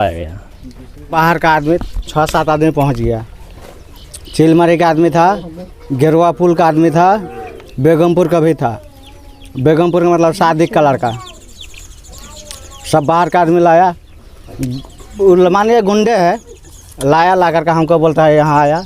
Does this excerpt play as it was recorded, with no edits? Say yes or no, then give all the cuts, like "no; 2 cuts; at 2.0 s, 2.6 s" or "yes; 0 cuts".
no; 1 cut; at 1.1 s